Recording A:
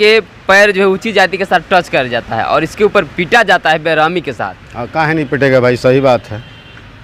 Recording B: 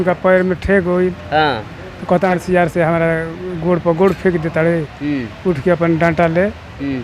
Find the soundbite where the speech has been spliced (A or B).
B